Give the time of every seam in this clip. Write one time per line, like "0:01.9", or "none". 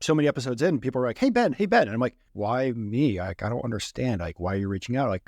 0:02.2